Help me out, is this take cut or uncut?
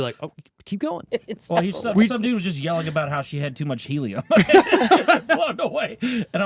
cut